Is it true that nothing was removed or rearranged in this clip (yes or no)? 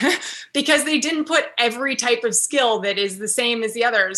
yes